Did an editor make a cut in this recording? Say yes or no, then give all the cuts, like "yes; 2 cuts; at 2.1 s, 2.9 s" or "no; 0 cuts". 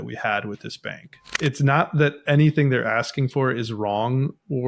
yes; 1 cut; at 1.3 s